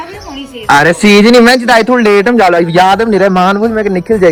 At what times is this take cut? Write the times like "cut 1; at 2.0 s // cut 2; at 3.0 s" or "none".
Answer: none